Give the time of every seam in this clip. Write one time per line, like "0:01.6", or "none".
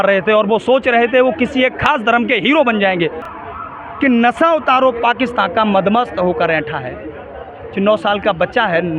0:03.3